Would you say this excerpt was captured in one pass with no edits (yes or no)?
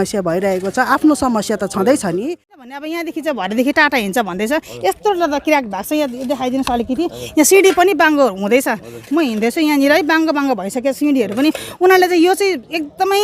no